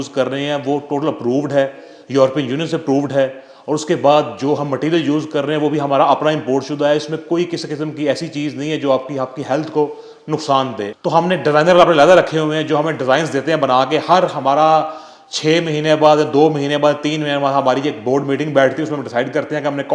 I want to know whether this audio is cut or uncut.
cut